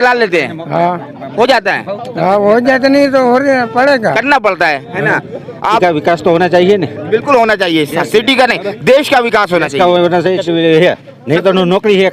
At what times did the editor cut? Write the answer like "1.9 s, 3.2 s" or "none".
5.8 s, 10.4 s